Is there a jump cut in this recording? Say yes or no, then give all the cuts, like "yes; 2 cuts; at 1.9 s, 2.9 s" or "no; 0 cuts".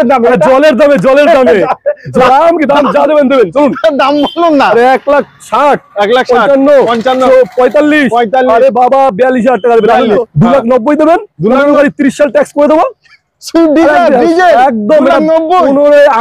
yes; 2 cuts; at 2.2 s, 10.3 s